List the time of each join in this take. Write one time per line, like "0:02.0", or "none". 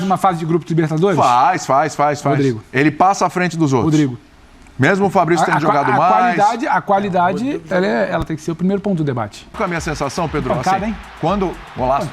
0:09.5